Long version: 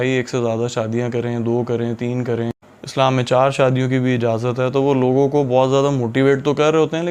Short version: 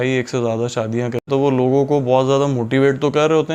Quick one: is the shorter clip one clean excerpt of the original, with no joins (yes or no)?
no